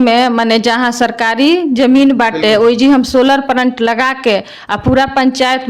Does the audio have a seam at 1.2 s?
no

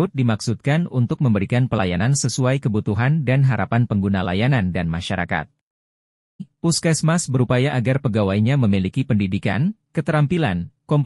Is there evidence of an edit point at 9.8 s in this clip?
no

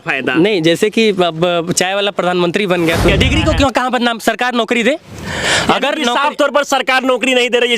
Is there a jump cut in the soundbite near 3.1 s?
yes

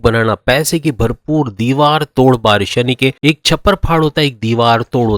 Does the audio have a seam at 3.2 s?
yes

